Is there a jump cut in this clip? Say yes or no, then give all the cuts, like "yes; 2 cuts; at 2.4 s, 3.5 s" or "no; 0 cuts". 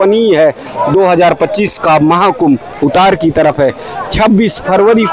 no; 0 cuts